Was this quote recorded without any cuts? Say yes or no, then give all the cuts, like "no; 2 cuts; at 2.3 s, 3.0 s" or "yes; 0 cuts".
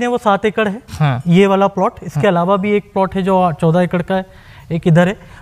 yes; 0 cuts